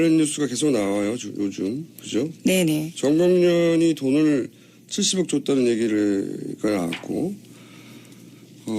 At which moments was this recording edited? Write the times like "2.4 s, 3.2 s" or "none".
4.0 s